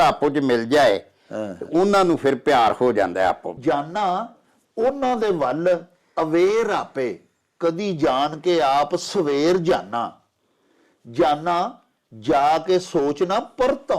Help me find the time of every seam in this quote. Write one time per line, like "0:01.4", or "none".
0:03.5